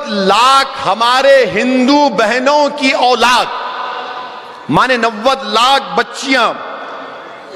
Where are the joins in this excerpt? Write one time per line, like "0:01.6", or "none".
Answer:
none